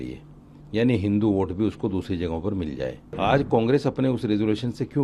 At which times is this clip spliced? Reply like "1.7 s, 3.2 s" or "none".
3.2 s